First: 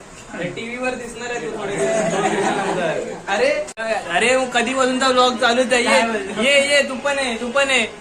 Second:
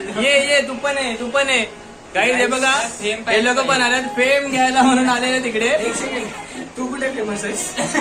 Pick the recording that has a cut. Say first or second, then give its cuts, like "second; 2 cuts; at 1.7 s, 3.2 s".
first; 1 cut; at 3.7 s